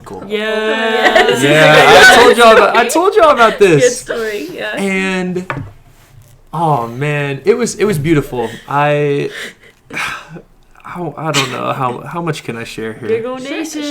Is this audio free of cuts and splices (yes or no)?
no